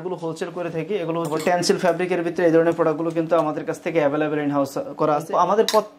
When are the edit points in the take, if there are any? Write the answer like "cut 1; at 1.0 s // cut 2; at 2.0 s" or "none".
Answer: cut 1; at 1.4 s // cut 2; at 5.3 s